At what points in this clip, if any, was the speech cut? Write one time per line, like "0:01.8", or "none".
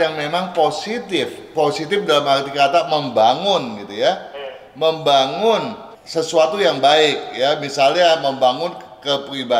none